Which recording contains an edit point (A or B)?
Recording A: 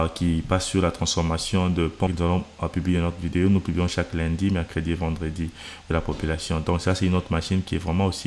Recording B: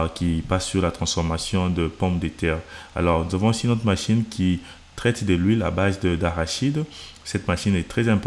A